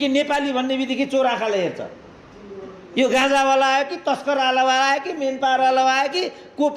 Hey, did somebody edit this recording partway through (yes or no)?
no